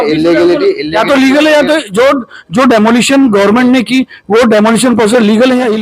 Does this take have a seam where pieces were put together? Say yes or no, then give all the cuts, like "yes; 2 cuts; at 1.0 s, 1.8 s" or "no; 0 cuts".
no; 0 cuts